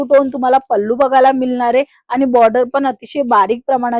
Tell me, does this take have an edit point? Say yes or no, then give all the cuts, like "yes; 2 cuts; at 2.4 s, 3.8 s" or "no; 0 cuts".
no; 0 cuts